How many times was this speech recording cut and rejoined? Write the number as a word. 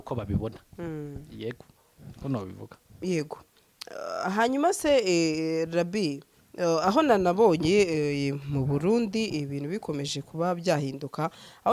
zero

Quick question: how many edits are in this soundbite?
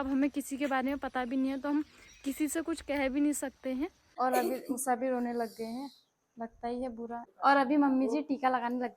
two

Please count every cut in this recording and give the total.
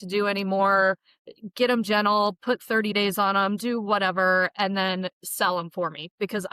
zero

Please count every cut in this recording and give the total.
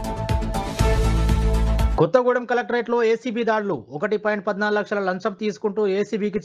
one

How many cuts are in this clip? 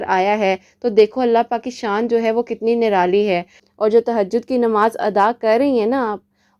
one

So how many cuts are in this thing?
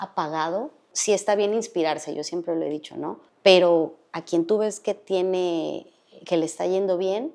two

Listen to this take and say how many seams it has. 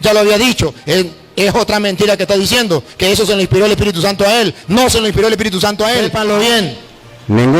one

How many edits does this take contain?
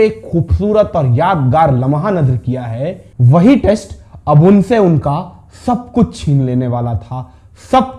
one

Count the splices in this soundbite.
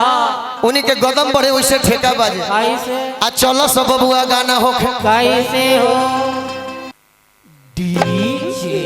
one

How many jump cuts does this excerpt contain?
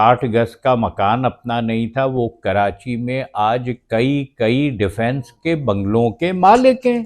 zero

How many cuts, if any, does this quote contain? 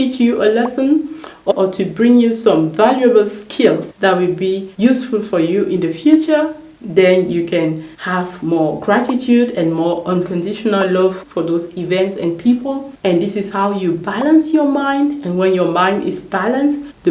two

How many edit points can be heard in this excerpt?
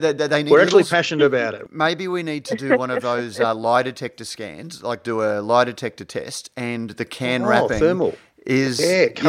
one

